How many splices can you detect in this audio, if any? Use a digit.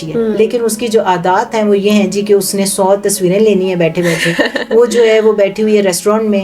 0